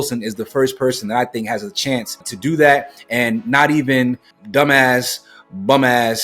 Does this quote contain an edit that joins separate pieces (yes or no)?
yes